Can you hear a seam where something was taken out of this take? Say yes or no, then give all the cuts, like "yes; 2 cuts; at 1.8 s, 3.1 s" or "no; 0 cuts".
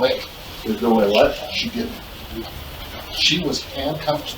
no; 0 cuts